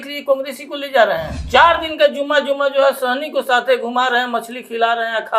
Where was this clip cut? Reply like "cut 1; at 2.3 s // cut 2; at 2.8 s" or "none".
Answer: cut 1; at 1.3 s